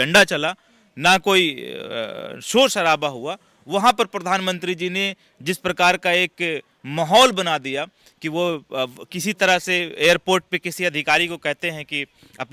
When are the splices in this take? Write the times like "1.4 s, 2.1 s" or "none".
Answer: none